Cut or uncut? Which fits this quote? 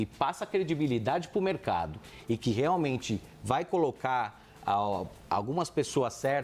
uncut